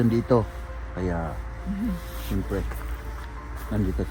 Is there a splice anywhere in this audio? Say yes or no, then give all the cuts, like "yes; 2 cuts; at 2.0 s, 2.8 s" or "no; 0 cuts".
no; 0 cuts